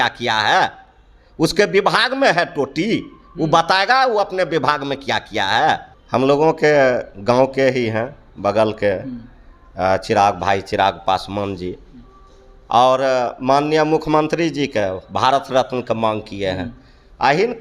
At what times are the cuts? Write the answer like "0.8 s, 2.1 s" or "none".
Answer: 5.9 s